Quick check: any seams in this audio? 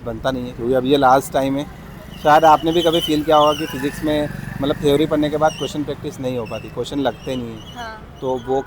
no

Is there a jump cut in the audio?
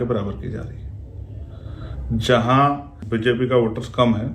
yes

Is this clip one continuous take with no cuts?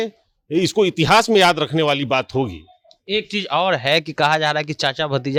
yes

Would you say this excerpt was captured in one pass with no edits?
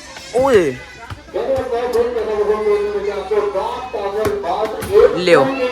yes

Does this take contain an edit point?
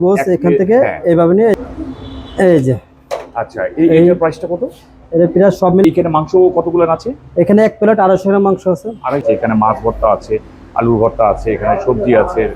yes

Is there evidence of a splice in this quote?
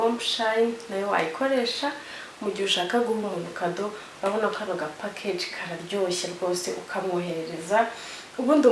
no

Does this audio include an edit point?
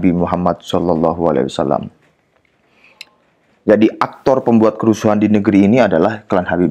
no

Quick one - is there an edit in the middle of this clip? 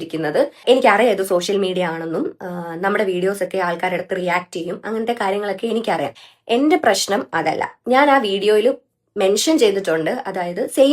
yes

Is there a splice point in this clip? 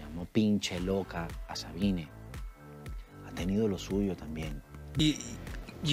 yes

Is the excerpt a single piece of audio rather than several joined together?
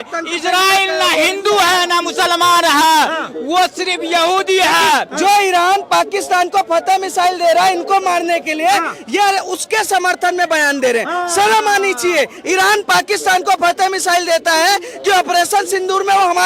no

